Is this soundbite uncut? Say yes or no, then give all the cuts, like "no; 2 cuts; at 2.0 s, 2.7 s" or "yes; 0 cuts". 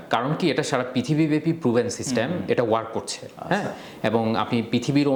yes; 0 cuts